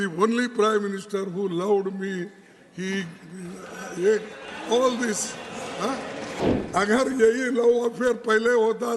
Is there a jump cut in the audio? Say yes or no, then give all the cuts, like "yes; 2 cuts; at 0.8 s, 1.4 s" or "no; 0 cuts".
yes; 1 cut; at 6.4 s